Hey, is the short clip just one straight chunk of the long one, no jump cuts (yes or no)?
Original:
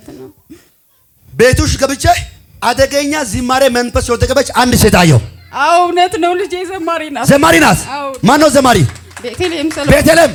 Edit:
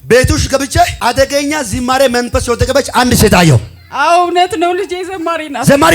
no